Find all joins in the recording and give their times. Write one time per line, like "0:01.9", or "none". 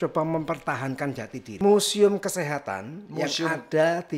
0:01.5